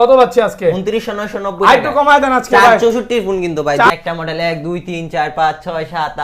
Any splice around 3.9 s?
yes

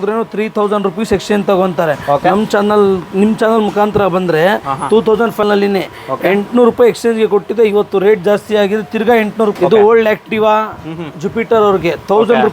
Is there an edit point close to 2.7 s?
no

